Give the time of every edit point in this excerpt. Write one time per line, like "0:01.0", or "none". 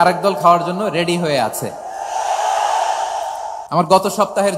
0:03.6